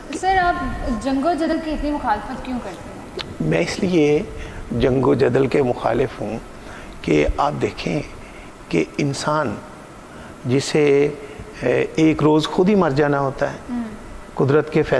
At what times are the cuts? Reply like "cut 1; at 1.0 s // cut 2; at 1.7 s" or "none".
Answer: cut 1; at 1.5 s